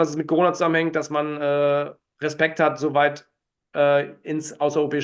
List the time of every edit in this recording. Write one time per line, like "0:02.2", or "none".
none